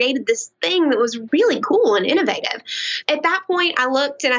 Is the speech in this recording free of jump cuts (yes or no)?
no